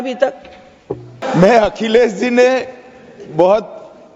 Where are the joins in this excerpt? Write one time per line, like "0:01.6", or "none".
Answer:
0:01.2